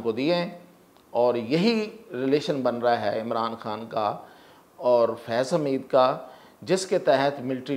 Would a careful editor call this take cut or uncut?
uncut